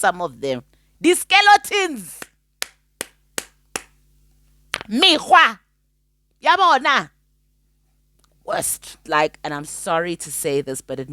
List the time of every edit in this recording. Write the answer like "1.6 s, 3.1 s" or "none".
9.0 s